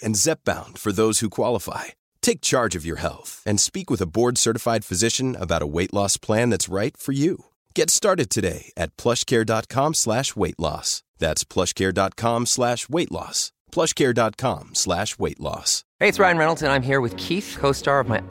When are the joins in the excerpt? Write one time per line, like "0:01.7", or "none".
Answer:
0:15.8